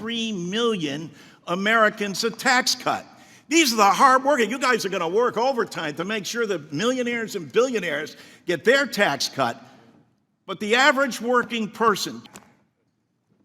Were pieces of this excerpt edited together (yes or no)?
yes